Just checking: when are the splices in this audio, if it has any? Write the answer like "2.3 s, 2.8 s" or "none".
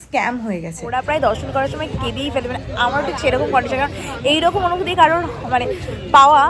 0.9 s